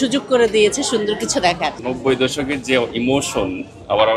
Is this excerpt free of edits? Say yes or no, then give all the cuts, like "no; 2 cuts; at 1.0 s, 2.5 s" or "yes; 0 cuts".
no; 1 cut; at 1.8 s